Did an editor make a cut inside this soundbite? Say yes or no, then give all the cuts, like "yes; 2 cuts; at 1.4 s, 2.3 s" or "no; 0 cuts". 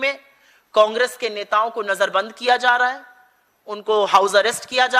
no; 0 cuts